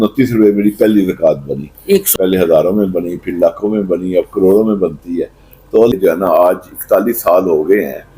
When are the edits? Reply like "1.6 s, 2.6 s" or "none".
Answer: 2.1 s, 5.9 s